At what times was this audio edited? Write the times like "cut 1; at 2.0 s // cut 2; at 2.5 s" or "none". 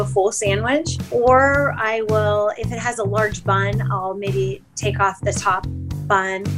cut 1; at 1.0 s